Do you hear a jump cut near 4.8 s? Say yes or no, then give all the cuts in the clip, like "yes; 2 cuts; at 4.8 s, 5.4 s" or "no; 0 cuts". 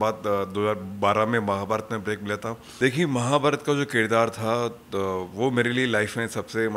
no; 1 cut; at 2.7 s